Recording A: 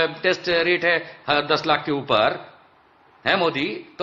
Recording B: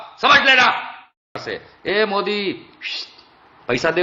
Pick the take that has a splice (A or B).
B